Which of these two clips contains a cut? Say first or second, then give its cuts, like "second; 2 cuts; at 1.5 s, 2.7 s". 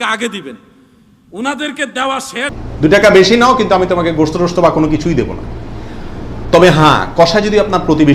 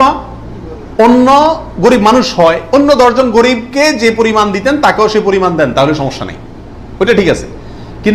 first; 1 cut; at 2.6 s